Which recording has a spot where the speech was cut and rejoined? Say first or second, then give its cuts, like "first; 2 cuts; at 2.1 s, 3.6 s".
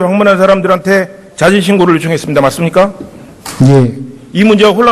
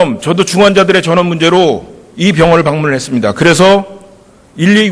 first; 1 cut; at 1.7 s